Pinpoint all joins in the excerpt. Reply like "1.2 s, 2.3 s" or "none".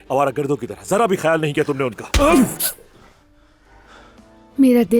4.1 s

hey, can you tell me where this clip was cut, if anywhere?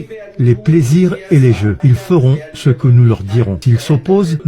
1.8 s, 3.3 s

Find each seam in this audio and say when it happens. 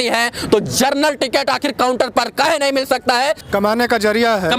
3.4 s

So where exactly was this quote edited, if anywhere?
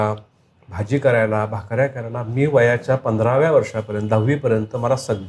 none

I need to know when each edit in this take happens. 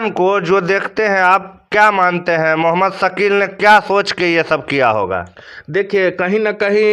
none

